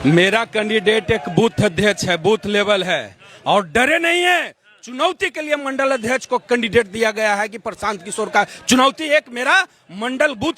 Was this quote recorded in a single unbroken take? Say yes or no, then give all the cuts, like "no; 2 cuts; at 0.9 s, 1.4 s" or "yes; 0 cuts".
yes; 0 cuts